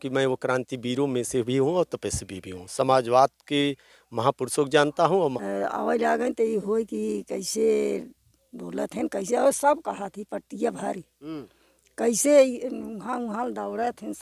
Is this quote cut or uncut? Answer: cut